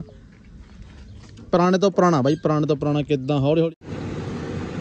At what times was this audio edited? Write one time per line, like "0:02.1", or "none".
0:03.8